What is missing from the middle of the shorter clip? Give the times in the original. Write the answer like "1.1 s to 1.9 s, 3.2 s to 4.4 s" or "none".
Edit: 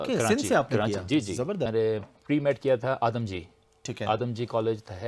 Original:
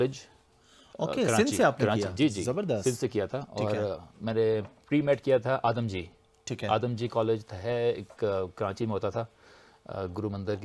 2.8 s to 4.3 s